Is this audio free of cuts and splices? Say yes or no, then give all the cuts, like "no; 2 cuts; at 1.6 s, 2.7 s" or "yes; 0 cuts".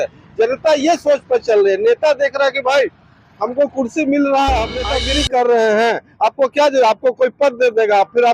no; 1 cut; at 5.0 s